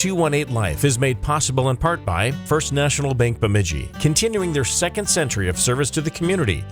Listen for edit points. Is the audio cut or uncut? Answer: uncut